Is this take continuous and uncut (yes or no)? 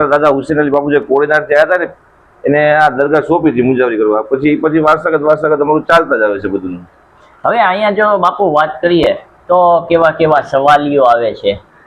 yes